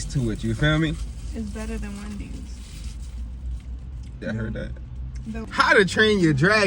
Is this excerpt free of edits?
no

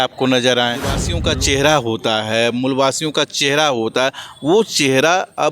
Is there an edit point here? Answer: yes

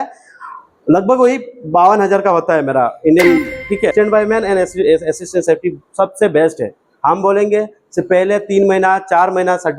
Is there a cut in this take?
yes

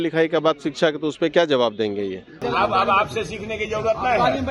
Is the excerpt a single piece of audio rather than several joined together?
no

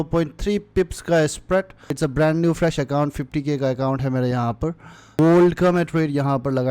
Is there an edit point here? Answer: yes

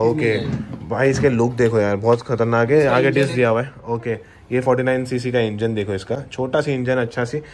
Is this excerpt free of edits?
yes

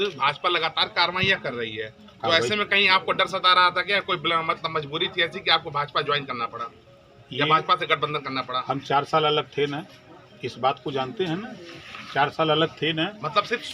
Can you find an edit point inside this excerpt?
no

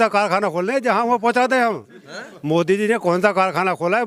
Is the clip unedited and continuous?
yes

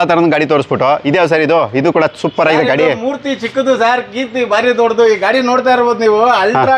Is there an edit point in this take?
no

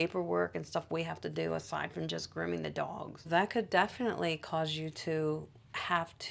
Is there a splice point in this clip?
no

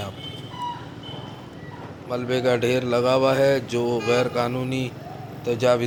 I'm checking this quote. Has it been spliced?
no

